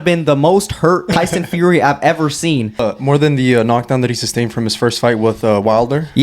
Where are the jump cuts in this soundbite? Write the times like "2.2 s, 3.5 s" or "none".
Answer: 1.1 s, 2.8 s